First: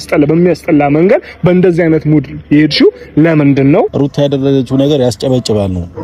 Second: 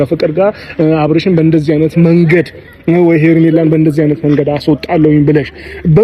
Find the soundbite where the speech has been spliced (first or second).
first